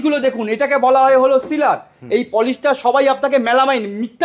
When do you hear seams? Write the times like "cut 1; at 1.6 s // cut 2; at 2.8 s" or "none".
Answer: none